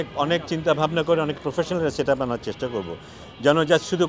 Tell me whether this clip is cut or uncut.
uncut